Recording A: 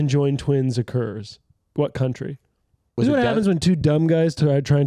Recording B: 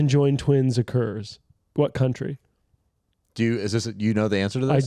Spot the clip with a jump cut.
A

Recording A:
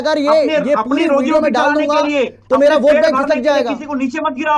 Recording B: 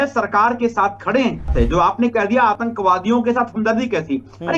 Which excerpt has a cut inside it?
B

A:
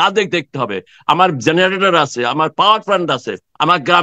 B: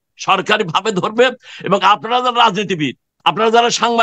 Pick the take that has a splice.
B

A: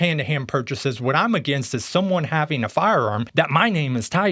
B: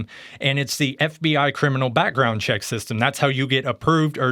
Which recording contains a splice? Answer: A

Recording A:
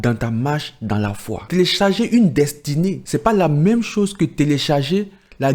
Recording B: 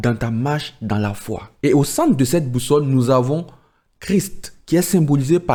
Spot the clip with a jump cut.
A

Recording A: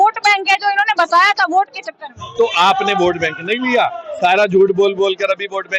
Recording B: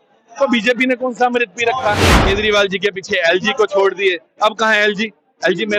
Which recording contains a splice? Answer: B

